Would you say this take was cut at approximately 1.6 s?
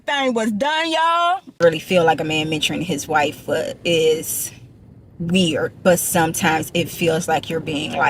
yes; 1 cut; at 1.6 s

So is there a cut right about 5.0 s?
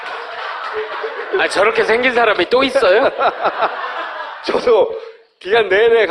no; 1 cut; at 1.6 s

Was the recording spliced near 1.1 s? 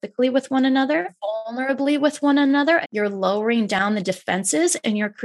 yes; 2 cuts; at 1.1 s, 2.9 s

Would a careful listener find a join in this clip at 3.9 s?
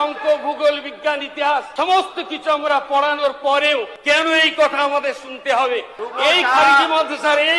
yes; 3 cuts; at 1.7 s, 3.9 s, 6.0 s

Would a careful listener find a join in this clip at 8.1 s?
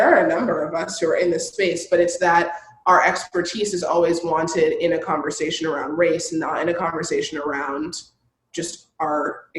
no; 0 cuts

